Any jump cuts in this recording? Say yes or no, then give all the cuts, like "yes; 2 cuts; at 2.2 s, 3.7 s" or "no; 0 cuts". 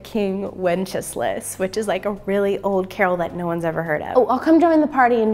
yes; 1 cut; at 4.0 s